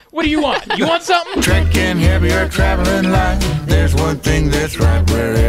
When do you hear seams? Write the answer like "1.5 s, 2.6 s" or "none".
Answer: 1.3 s